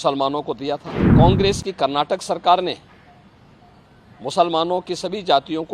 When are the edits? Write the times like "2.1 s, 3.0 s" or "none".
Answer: 1.0 s